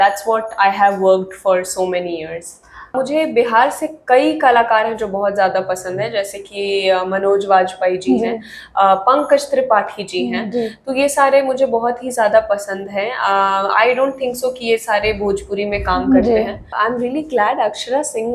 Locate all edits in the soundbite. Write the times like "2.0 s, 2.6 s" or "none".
2.9 s, 16.7 s